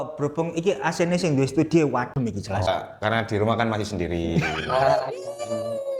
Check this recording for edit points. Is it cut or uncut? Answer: cut